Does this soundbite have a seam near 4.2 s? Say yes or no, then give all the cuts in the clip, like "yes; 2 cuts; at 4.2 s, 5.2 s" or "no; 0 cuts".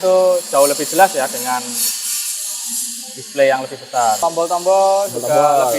yes; 1 cut; at 4.2 s